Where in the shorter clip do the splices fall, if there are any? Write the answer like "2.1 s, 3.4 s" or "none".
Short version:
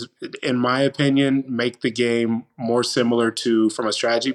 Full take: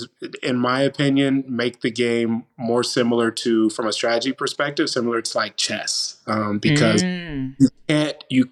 none